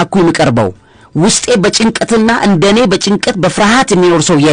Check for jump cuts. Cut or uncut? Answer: uncut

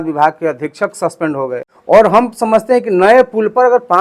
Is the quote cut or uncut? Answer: cut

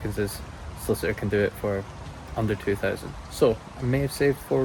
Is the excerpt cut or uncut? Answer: uncut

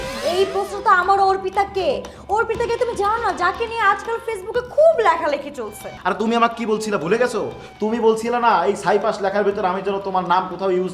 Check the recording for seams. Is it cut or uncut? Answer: cut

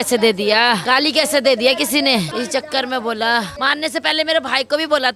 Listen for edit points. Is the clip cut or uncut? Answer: cut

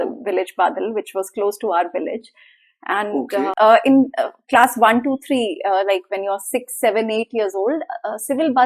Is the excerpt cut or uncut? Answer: uncut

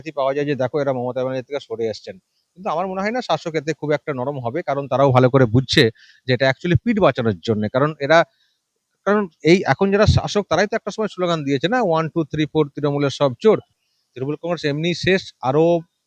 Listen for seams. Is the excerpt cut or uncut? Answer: cut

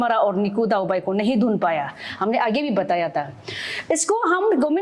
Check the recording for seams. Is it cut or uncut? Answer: uncut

